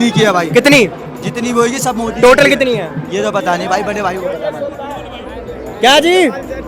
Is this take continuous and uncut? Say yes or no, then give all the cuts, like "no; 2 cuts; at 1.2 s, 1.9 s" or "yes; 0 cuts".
yes; 0 cuts